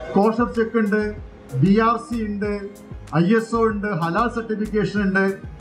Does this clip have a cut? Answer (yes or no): no